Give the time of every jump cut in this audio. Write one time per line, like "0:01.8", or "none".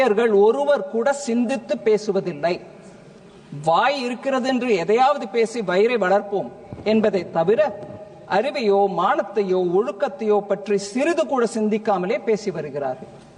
none